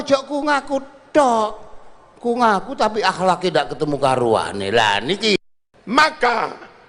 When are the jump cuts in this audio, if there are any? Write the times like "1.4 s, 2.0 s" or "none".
5.6 s